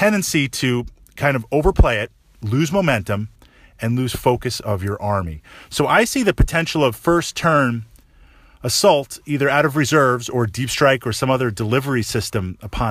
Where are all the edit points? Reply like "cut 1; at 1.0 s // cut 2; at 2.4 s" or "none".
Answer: cut 1; at 1.6 s